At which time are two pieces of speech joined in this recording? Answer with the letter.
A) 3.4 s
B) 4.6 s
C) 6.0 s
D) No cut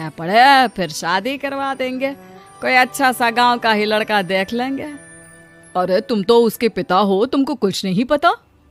D